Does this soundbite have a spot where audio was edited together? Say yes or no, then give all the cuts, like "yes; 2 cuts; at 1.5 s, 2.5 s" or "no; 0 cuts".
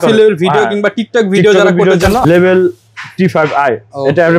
yes; 1 cut; at 2.3 s